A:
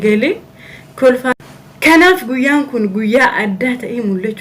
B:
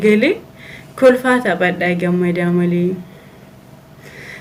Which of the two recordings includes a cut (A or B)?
A